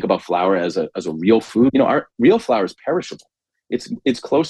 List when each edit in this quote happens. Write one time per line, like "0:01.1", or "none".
0:01.7